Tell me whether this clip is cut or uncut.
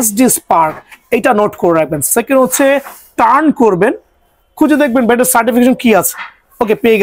uncut